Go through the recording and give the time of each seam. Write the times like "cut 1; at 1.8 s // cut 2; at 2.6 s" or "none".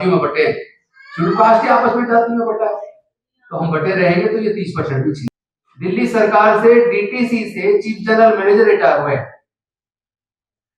cut 1; at 5.3 s